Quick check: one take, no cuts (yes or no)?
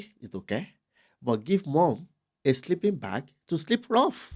yes